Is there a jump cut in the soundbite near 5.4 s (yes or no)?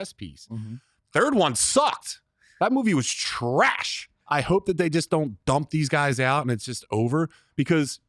no